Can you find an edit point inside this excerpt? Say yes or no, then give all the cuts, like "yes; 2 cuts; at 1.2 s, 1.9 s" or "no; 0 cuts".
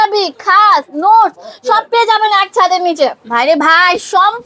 yes; 1 cut; at 3.2 s